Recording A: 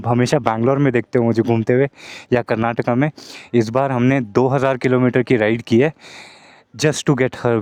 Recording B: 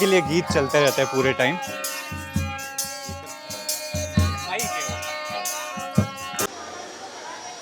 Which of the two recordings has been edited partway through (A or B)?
B